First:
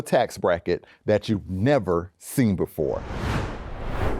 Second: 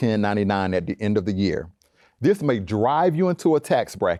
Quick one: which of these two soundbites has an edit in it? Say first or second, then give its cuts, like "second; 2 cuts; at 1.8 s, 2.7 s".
first; 1 cut; at 3.2 s